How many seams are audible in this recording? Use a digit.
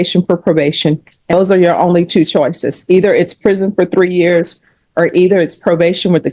1